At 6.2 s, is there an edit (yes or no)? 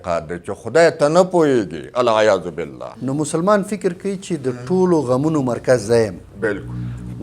no